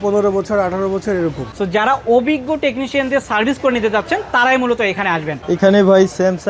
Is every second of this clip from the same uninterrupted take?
no; 2 cuts; at 1.5 s, 5.3 s

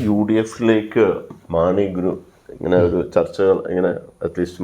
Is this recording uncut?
no; 1 cut; at 1.3 s

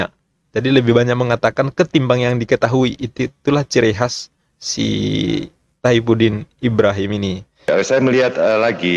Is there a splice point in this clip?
yes; 1 cut; at 7.7 s

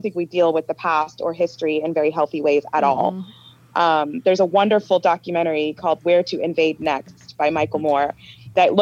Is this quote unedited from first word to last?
yes; 0 cuts

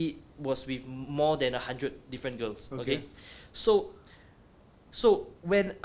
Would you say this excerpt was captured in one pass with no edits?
yes; 0 cuts

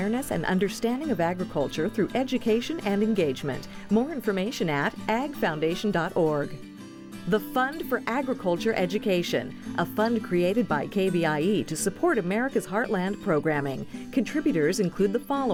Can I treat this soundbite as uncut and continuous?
yes; 0 cuts

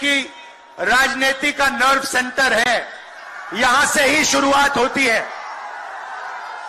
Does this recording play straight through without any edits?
yes; 0 cuts

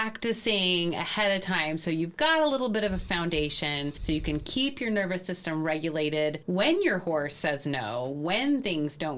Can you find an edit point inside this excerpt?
yes; 2 cuts; at 4.0 s, 6.4 s

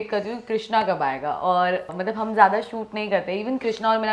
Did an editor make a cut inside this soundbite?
yes; 1 cut; at 1.9 s

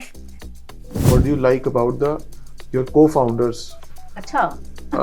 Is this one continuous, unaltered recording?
no; 1 cut; at 1.1 s

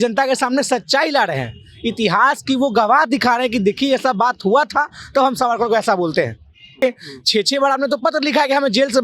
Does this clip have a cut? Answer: yes; 1 cut; at 6.8 s

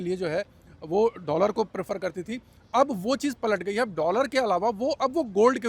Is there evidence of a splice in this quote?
no; 0 cuts

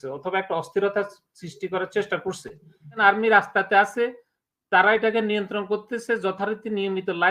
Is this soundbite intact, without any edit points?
no; 1 cut; at 3.0 s

